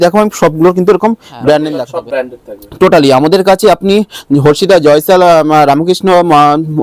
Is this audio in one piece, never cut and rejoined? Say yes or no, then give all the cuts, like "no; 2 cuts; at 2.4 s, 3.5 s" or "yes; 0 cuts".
no; 1 cut; at 1.7 s